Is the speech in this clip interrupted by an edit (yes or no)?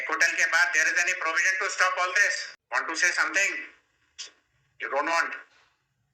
yes